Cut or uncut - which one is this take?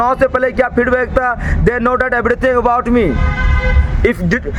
uncut